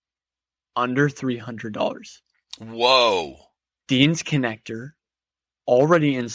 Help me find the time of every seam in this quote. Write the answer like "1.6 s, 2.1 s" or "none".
none